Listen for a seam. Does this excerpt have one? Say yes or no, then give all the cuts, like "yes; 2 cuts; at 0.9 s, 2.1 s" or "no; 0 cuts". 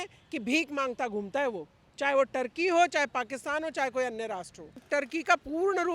yes; 1 cut; at 4.8 s